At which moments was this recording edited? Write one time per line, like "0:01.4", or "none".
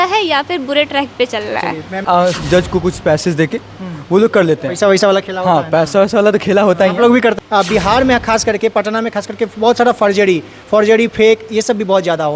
0:02.0
0:07.4